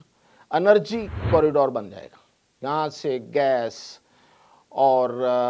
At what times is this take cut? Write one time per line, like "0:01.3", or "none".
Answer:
0:01.1